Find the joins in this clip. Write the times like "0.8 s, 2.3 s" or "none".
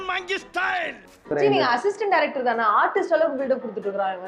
1.2 s